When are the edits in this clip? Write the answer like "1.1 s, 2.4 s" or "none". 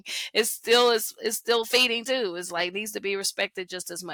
none